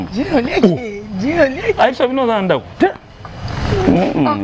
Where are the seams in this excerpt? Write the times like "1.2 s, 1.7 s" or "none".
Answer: none